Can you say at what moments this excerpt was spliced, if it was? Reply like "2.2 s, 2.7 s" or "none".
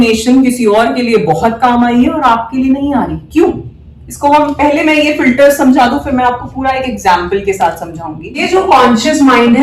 8.4 s

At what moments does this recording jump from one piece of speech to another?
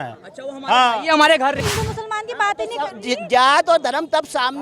1.6 s

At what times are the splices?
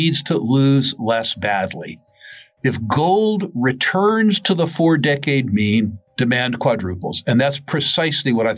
6.0 s

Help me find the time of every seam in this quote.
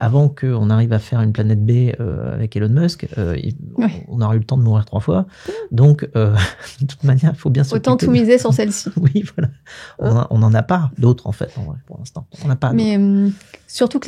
none

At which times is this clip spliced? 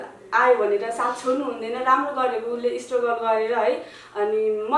none

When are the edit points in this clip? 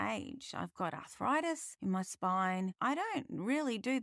1.7 s, 2.7 s

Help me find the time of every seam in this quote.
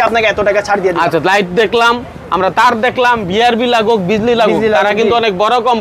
none

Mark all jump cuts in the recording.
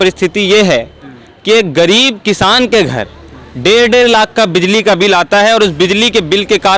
none

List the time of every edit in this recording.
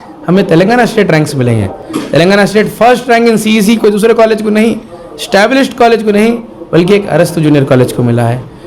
none

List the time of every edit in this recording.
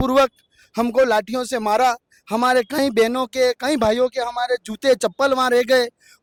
none

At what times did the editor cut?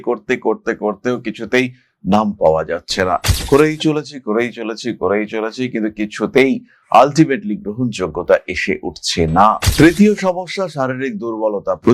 9.6 s

